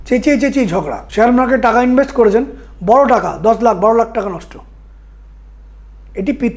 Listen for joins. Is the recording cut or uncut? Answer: cut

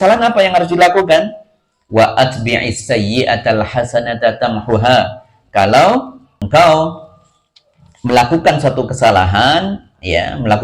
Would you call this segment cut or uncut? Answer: cut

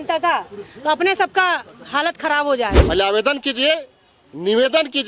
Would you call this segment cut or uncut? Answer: cut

